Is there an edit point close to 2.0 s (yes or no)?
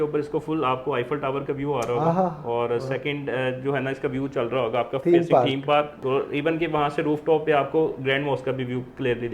no